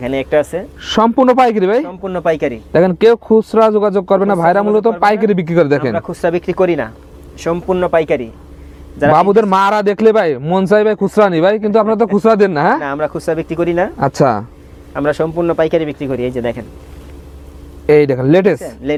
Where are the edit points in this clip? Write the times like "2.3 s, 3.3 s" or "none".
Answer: none